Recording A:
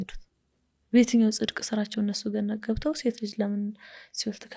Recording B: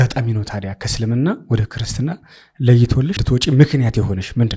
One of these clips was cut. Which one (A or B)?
B